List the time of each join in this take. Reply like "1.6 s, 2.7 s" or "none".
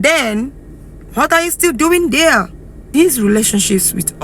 2.9 s